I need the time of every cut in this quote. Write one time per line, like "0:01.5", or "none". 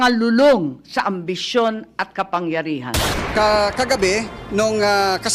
0:03.1